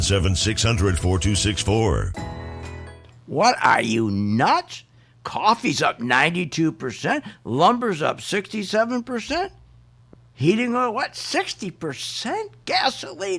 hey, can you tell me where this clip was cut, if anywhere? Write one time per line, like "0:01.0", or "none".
0:03.1